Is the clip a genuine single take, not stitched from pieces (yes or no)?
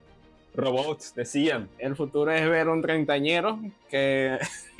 no